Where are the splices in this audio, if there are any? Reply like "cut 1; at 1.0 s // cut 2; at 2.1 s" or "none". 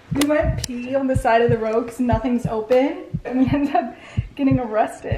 cut 1; at 3.3 s